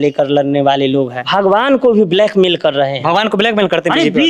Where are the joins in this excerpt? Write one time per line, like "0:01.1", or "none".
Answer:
0:01.3